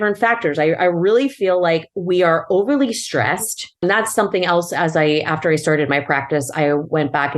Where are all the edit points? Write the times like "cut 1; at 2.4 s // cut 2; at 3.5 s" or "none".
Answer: cut 1; at 3.8 s